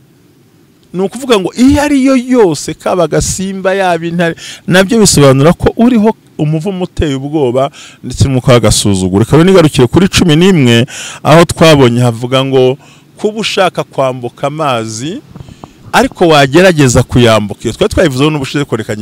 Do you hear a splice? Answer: no; 0 cuts

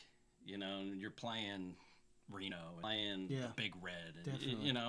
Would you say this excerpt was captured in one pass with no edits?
no; 1 cut; at 2.8 s

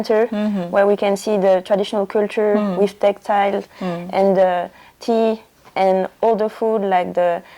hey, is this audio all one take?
yes; 0 cuts

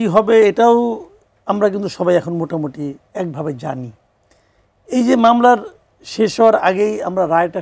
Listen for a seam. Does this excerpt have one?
no; 0 cuts

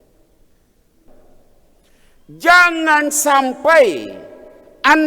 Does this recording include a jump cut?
yes; 1 cut; at 1.1 s

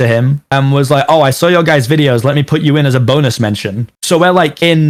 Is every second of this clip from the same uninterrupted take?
yes; 0 cuts

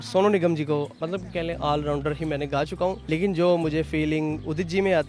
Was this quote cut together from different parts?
yes; 2 cuts; at 1.0 s, 3.0 s

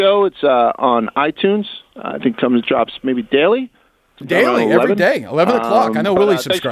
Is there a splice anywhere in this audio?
no; 0 cuts

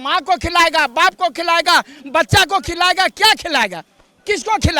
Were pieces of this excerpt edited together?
no; 0 cuts

